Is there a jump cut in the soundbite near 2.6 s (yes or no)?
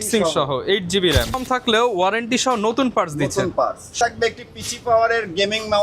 no